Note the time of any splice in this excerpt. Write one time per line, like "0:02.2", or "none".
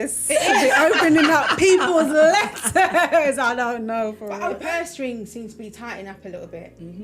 0:04.6